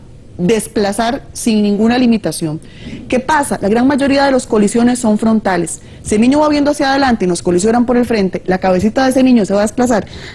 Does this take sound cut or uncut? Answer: cut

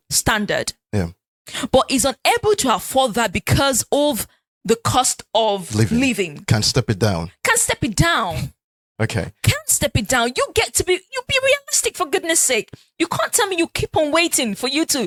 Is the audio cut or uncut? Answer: uncut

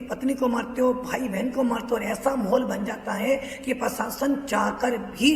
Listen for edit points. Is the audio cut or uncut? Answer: uncut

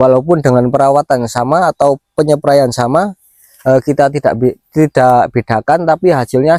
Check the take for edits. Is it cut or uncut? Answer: uncut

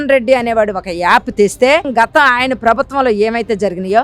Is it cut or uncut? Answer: cut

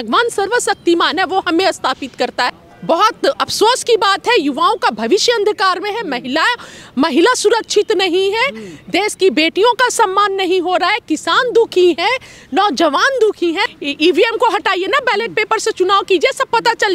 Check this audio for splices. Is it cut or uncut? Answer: cut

